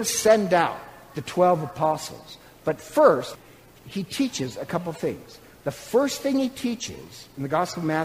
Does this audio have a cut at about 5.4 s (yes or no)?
no